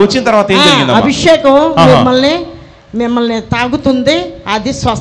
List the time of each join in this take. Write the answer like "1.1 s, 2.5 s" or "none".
none